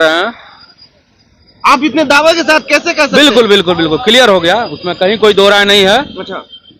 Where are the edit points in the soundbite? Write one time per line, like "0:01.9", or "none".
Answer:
none